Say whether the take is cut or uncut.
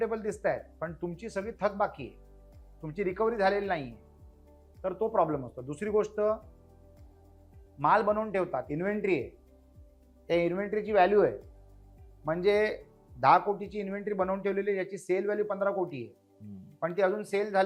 uncut